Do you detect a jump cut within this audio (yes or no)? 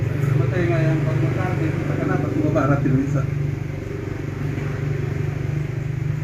no